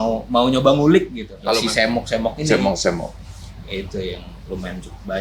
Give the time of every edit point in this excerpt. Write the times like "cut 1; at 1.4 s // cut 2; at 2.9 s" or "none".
cut 1; at 1.4 s